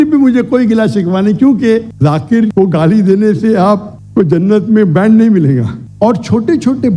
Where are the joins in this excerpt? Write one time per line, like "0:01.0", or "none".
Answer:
0:01.9
0:05.8